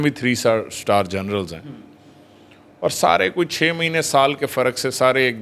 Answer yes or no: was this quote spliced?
no